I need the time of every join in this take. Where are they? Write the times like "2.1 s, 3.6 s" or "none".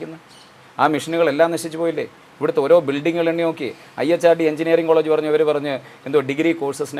none